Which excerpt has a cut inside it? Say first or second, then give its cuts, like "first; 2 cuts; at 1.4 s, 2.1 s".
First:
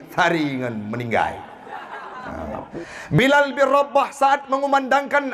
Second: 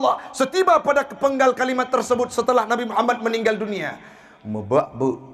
first; 1 cut; at 2.7 s